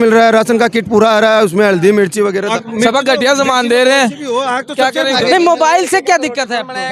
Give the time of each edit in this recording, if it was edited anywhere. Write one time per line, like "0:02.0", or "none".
0:02.5
0:05.2